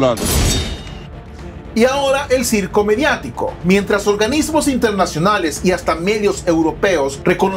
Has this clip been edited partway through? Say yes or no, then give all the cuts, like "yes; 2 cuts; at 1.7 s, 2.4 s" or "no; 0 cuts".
yes; 1 cut; at 1.3 s